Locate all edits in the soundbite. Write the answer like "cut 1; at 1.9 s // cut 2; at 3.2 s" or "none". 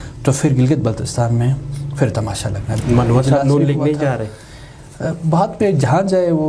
cut 1; at 2.7 s